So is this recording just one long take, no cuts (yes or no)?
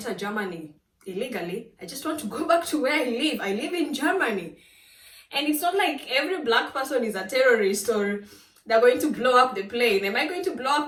yes